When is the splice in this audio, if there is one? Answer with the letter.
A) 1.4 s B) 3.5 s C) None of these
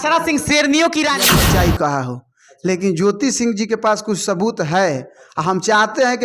A